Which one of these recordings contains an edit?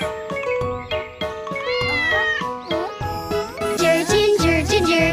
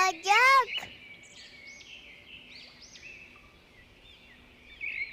second; 1 cut; at 1.1 s

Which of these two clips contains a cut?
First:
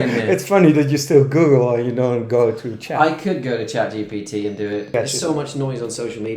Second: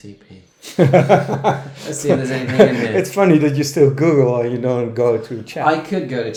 first; 1 cut; at 4.9 s

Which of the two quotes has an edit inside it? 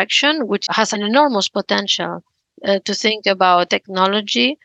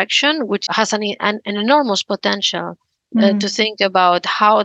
first; 2 cuts; at 0.9 s, 3.7 s

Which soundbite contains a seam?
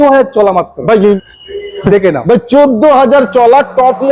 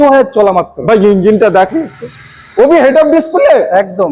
first; 1 cut; at 1.2 s

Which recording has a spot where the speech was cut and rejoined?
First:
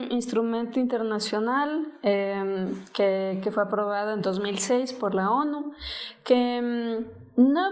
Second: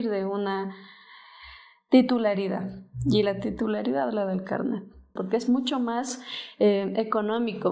second; 1 cut; at 5.1 s

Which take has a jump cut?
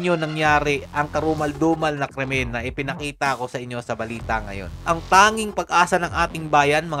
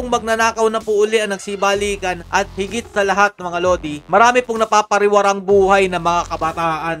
first; 1 cut; at 4.8 s

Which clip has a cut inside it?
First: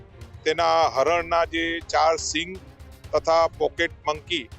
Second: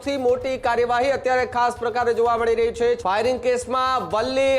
second; 1 cut; at 3.0 s

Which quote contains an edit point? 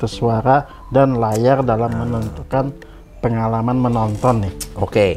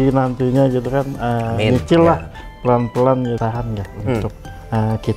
second; 1 cut; at 3.4 s

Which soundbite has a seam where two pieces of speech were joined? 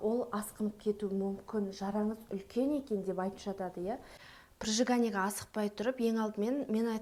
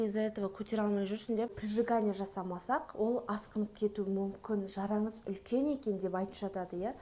second; 1 cut; at 1.5 s

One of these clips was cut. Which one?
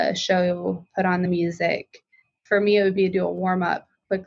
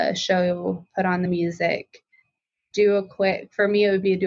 first; 1 cut; at 2.4 s

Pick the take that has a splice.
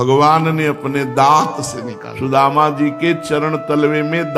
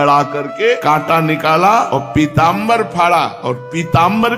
second; 3 cuts; at 0.8 s, 1.9 s, 3.4 s

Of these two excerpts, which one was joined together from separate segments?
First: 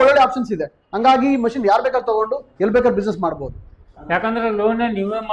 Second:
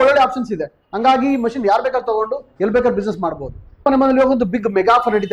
second; 1 cut; at 3.8 s

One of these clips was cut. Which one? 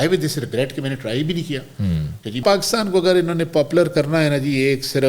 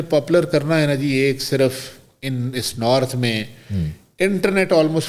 first; 1 cut; at 2.4 s

